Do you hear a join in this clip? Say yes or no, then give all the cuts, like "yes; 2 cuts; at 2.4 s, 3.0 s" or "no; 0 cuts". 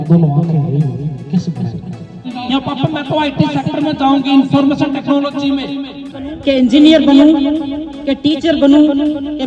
yes; 2 cuts; at 2.3 s, 6.4 s